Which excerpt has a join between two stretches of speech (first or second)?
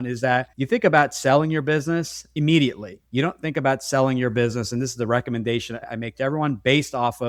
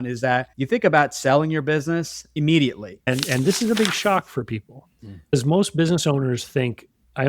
second